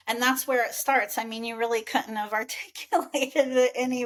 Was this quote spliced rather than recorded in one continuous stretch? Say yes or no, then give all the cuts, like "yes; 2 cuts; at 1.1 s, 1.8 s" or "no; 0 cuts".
no; 0 cuts